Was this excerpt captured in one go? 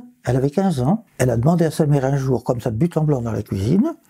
no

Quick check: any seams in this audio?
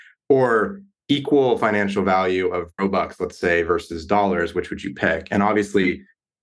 yes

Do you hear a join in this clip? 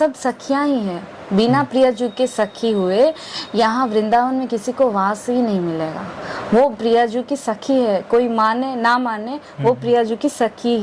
no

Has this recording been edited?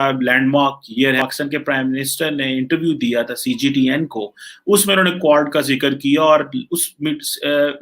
yes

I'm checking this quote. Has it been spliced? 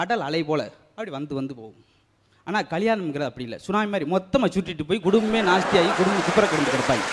no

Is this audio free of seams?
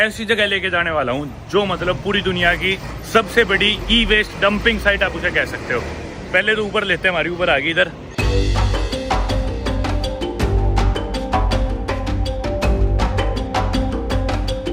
yes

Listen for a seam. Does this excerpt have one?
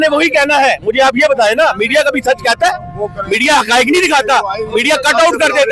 no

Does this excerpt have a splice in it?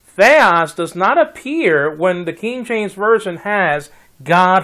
yes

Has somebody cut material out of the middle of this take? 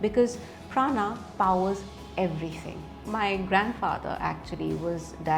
yes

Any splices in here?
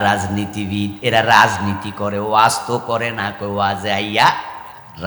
no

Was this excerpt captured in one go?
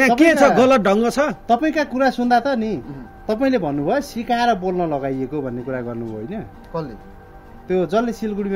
yes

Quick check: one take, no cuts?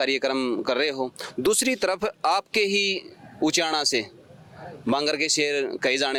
yes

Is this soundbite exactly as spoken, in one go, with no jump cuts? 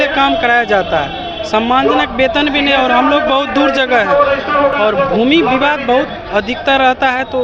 yes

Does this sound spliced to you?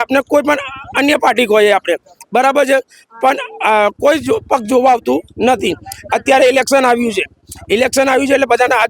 no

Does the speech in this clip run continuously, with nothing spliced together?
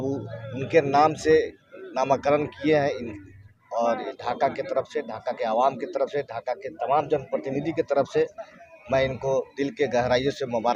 yes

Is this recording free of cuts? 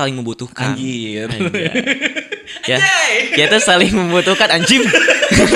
yes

